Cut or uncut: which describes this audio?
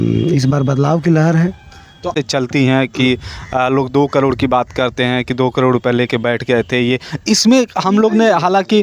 cut